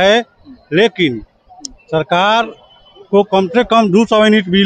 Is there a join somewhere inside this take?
no; 0 cuts

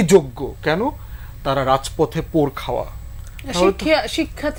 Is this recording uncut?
yes; 0 cuts

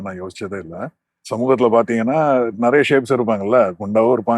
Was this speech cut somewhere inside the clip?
no; 0 cuts

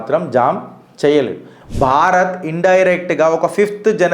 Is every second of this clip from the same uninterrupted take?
no; 1 cut; at 1.4 s

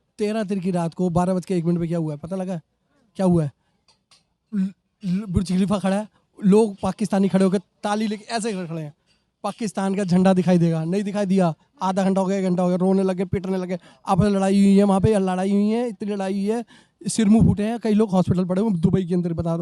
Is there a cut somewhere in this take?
no; 0 cuts

